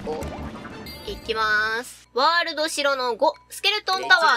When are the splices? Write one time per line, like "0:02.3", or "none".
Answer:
0:00.9
0:02.0